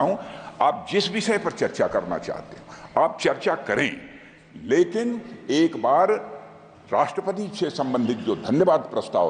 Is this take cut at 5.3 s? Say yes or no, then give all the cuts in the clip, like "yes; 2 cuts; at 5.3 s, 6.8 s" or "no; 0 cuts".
no; 0 cuts